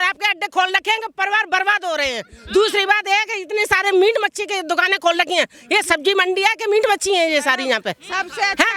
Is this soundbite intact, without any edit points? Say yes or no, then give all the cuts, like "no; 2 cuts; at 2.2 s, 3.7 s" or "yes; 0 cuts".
yes; 0 cuts